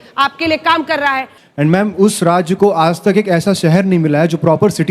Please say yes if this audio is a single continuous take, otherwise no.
no